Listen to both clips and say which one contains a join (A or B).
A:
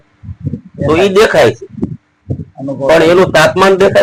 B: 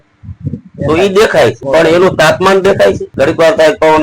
B